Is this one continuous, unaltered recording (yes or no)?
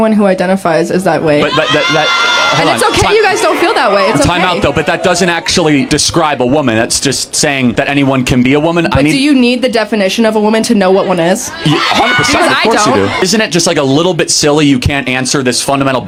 yes